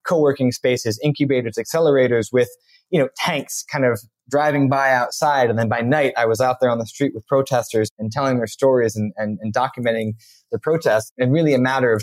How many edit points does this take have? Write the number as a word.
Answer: two